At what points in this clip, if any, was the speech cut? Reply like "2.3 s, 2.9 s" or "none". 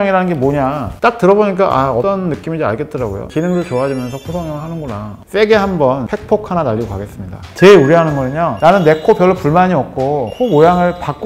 5.2 s, 7.4 s